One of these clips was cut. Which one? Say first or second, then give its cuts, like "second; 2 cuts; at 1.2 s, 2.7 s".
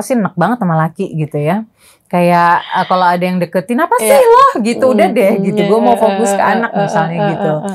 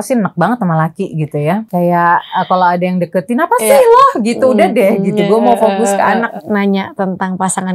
second; 2 cuts; at 1.7 s, 6.3 s